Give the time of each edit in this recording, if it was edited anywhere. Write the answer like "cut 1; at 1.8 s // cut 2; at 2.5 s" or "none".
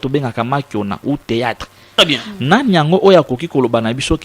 cut 1; at 1.8 s